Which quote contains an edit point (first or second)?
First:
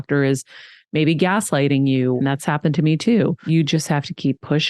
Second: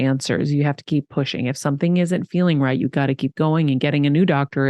first